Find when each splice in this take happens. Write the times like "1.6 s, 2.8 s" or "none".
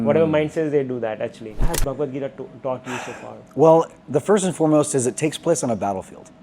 1.7 s